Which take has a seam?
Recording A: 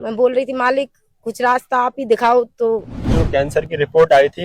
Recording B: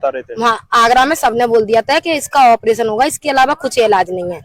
A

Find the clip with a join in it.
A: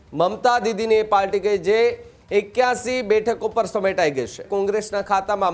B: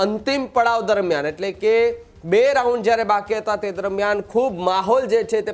A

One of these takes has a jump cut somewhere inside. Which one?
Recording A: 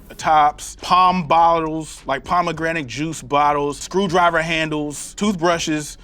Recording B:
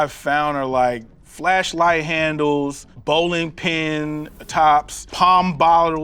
A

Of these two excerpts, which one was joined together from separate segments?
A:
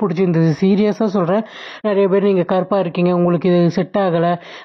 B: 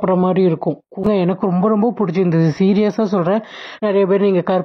B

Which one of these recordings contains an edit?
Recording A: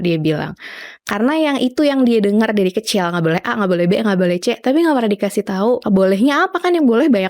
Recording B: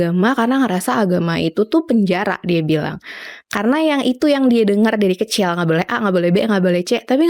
A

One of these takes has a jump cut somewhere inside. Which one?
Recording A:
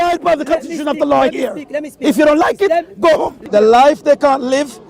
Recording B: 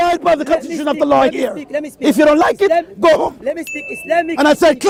A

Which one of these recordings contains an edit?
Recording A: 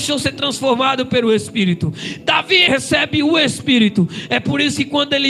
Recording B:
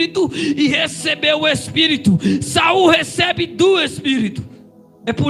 A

